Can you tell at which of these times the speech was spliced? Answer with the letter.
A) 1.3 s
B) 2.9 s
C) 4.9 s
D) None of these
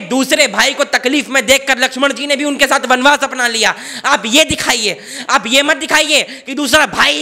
D